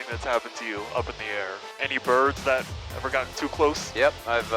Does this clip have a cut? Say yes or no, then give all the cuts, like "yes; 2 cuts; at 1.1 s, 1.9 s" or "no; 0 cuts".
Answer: no; 0 cuts